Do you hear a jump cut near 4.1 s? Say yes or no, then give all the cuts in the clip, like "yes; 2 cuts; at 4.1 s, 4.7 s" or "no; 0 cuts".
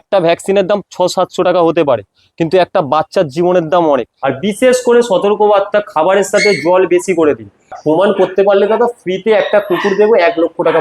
yes; 2 cuts; at 4.1 s, 7.7 s